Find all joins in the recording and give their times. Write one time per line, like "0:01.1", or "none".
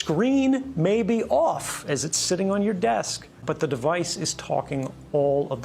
0:03.4